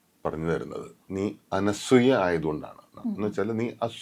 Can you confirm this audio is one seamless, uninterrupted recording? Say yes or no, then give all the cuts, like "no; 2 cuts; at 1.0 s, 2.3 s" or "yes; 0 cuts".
no; 2 cuts; at 1.0 s, 2.9 s